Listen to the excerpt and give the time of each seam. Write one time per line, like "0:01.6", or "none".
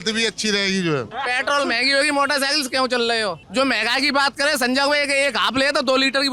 0:01.1
0:03.4